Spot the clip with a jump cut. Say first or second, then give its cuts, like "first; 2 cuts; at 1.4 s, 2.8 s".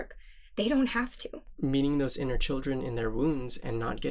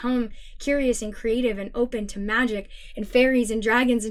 first; 1 cut; at 1.5 s